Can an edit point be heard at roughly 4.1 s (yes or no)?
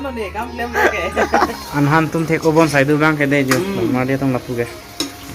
no